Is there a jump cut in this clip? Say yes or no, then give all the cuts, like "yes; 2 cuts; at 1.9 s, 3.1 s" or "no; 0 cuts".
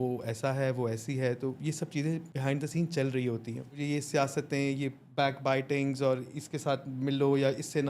yes; 2 cuts; at 2.3 s, 3.8 s